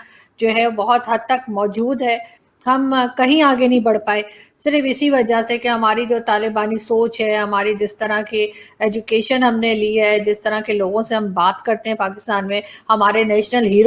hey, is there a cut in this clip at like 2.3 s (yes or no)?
yes